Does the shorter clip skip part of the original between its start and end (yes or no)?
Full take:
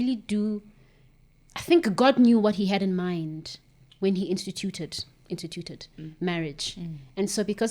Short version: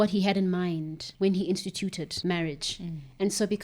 yes